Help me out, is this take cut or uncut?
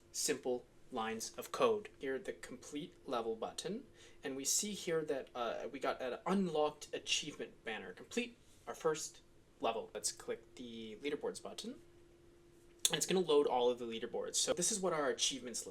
cut